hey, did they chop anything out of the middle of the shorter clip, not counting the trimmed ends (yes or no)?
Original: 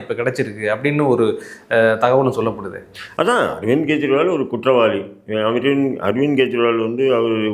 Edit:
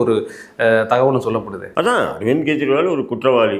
yes